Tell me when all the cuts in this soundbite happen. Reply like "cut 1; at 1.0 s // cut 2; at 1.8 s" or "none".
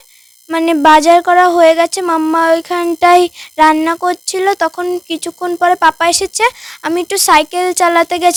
none